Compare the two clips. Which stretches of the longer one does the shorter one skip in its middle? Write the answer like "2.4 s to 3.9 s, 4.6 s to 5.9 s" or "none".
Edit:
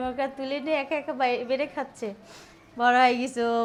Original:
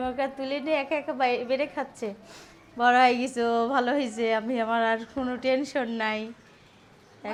none